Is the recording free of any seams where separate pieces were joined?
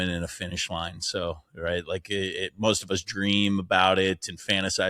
yes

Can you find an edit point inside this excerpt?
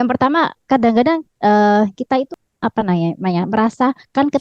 yes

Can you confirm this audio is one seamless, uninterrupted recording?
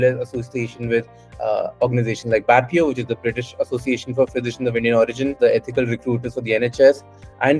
no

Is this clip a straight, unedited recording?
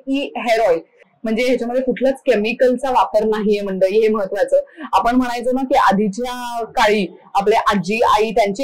no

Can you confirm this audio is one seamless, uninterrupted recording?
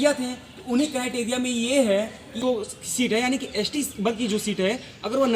no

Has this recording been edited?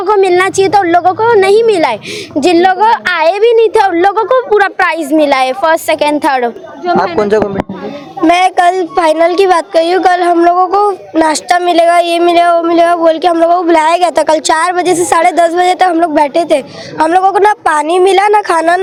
no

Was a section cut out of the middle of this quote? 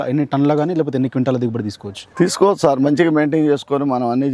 no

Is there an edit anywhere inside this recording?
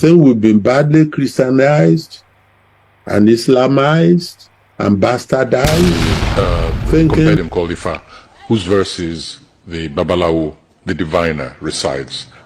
yes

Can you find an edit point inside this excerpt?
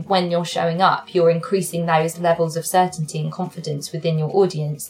no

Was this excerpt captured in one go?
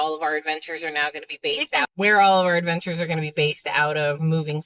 no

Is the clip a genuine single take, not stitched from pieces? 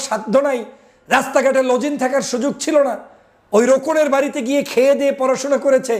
yes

